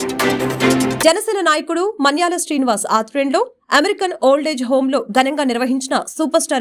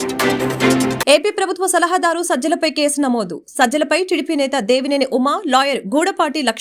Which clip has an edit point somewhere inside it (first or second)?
second